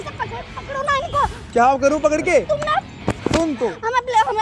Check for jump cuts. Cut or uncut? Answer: uncut